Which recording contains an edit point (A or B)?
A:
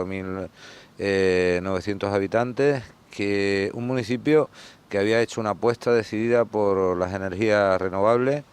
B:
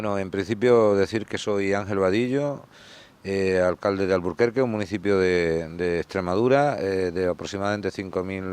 B